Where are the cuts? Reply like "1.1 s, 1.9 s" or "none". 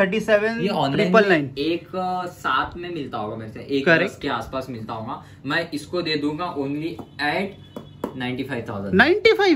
none

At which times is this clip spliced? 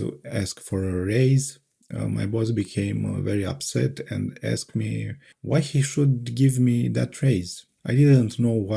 none

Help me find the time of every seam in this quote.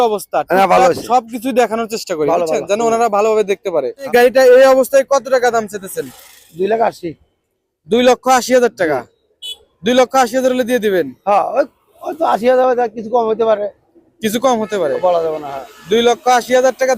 4.1 s

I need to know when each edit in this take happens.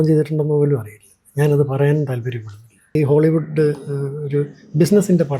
2.9 s

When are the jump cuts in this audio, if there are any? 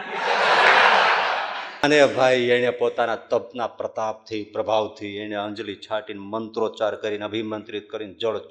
1.6 s

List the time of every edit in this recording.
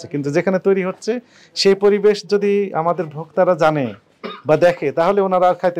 none

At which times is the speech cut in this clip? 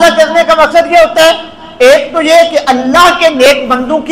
none

